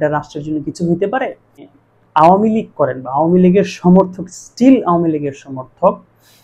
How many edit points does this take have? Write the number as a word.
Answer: one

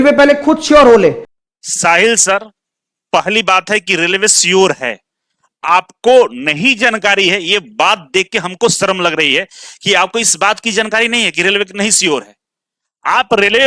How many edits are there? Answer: zero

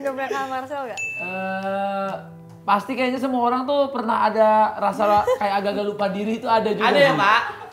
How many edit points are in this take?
zero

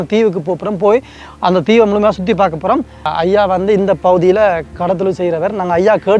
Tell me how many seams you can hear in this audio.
one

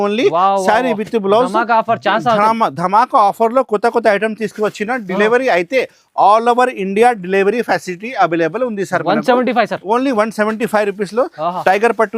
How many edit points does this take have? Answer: zero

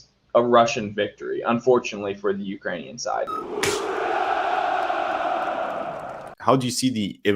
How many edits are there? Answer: two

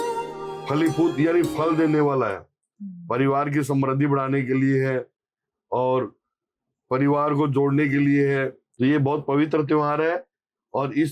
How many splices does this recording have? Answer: one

